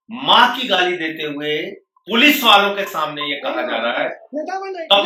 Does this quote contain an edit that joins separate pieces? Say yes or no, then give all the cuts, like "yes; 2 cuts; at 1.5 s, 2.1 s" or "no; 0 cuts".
no; 0 cuts